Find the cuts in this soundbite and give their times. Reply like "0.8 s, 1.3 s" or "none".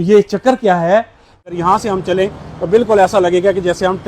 1.4 s